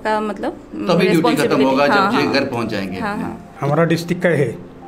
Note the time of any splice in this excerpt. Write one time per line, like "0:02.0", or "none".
0:03.4